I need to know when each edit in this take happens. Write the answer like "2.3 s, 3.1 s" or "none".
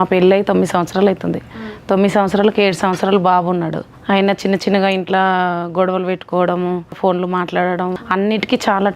3.9 s, 7.0 s, 8.0 s